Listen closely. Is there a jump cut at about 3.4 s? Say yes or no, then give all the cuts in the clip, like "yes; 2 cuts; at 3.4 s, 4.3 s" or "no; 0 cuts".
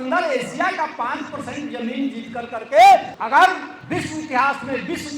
yes; 1 cut; at 3.4 s